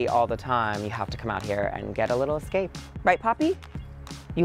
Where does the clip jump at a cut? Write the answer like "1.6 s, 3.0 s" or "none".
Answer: 2.8 s